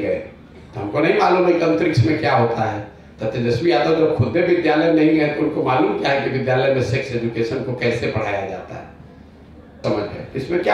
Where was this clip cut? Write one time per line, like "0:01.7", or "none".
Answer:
0:09.8